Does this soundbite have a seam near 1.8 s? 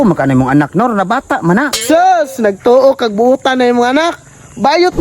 yes; 1 cut; at 1.8 s

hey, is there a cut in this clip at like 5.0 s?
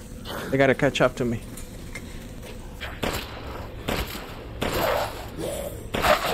no; 1 cut; at 2.8 s

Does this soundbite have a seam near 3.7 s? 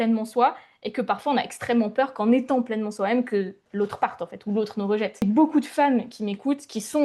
no; 1 cut; at 5.2 s

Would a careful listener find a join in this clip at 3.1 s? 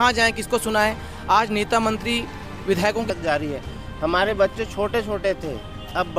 yes; 1 cut; at 3.1 s

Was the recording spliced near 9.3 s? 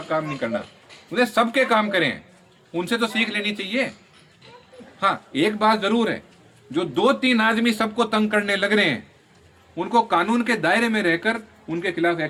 no; 0 cuts

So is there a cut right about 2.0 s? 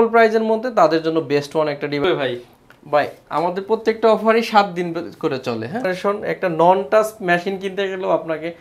yes; 2 cuts; at 2.0 s, 5.9 s

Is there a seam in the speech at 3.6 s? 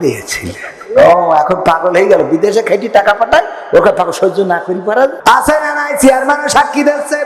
no; 1 cut; at 5.2 s

